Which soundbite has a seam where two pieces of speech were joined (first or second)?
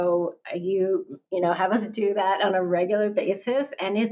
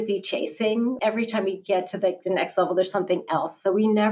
second